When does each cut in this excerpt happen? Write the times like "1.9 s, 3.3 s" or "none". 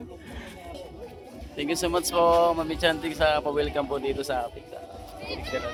none